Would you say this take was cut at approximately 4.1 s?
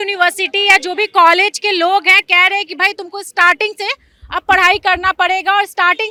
no; 0 cuts

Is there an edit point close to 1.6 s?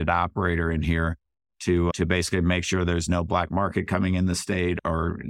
no; 0 cuts

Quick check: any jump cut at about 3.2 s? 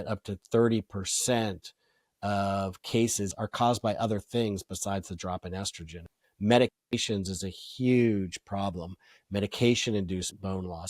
yes; 2 cuts; at 3.2 s, 6.1 s

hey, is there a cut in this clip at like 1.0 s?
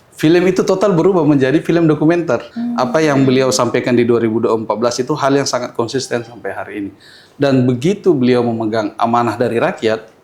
no; 1 cut; at 2.5 s

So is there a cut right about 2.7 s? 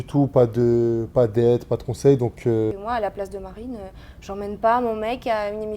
yes; 1 cut; at 2.7 s

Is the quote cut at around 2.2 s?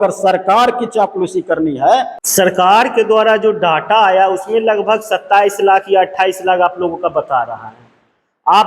yes; 1 cut; at 2.2 s

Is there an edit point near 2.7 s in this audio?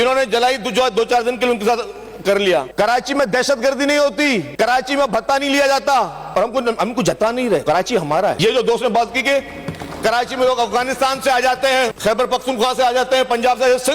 yes; 5 cuts; at 2.7 s, 4.5 s, 6.2 s, 7.7 s, 12.0 s

